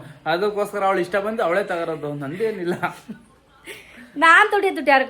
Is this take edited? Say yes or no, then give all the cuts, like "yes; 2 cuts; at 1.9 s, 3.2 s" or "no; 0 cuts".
no; 0 cuts